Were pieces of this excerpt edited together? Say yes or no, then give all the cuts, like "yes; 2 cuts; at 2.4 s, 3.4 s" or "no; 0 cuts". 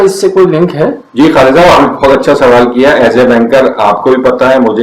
no; 0 cuts